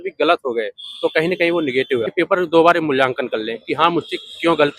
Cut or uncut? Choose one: cut